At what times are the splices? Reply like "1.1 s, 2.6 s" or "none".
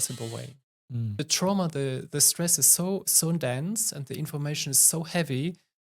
1.2 s